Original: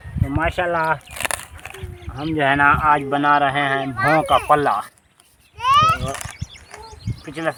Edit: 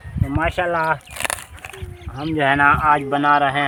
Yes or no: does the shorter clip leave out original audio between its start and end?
no